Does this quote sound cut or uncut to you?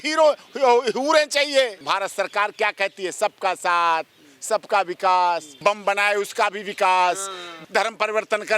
cut